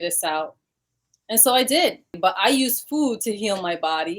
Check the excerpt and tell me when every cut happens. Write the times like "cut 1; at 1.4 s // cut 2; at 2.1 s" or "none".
cut 1; at 2.2 s